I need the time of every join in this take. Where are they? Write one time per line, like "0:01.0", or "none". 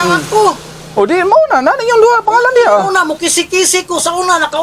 none